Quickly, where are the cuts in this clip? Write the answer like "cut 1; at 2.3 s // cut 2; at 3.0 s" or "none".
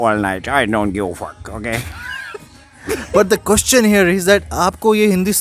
none